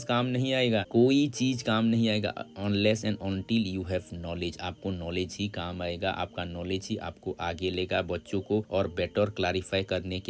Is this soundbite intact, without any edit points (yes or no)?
yes